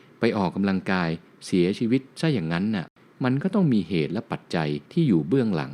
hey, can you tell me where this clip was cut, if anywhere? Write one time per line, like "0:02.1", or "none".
0:01.3
0:03.0
0:04.8